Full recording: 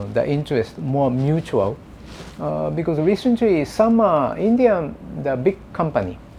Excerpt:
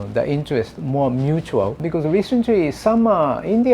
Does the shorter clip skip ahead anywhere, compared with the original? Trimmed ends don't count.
yes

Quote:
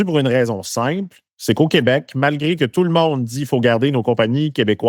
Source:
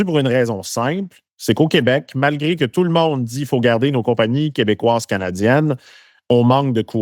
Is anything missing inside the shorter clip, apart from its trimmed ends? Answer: no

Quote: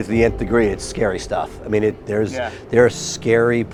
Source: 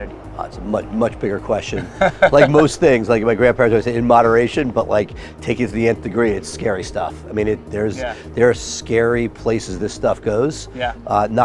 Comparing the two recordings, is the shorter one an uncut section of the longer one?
yes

